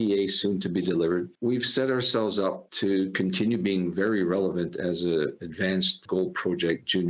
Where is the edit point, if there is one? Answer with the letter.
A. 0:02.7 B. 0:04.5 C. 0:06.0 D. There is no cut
C